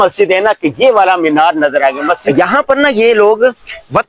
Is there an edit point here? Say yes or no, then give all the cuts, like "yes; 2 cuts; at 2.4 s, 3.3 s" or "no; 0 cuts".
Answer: yes; 1 cut; at 2.3 s